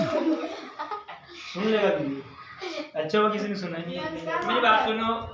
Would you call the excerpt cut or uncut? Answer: cut